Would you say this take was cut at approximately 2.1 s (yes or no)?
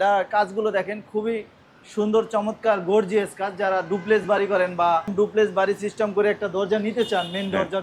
no